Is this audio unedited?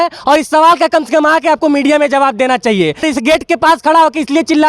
no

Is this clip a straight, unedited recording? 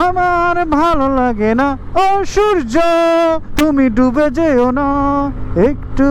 yes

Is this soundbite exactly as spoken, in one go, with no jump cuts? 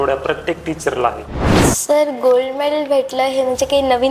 no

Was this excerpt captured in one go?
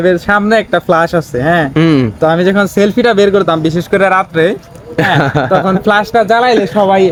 yes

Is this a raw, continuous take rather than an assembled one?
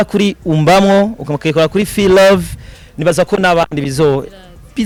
yes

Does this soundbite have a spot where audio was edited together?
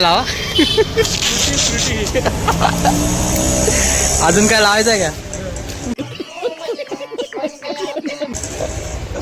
no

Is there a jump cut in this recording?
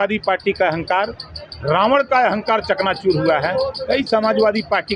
no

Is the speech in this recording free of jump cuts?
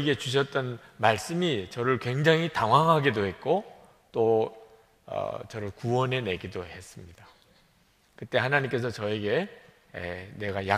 yes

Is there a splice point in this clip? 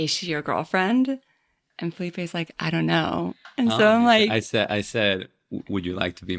yes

